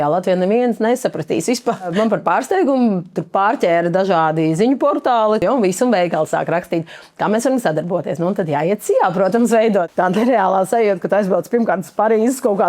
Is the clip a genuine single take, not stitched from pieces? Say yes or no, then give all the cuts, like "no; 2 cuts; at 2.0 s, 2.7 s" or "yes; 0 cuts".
no; 3 cuts; at 1.9 s, 5.4 s, 9.9 s